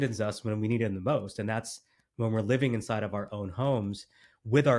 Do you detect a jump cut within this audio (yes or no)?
no